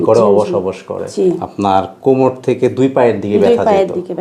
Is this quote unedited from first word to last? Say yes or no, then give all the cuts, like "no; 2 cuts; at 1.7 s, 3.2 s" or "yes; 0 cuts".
no; 1 cut; at 1.0 s